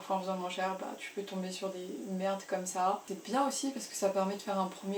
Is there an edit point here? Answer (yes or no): yes